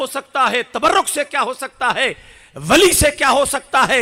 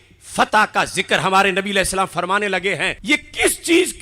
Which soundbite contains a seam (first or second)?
second